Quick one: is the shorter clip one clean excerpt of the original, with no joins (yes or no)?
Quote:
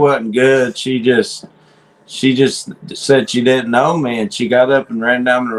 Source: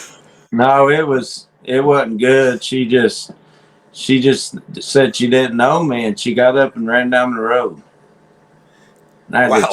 yes